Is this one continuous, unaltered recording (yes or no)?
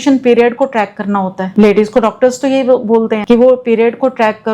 no